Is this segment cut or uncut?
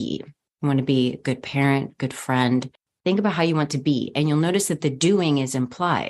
cut